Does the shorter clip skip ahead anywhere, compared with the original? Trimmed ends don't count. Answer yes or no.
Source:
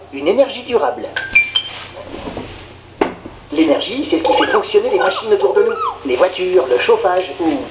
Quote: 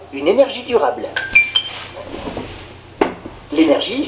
no